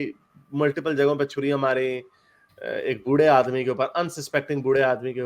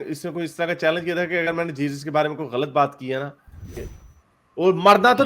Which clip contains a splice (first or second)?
second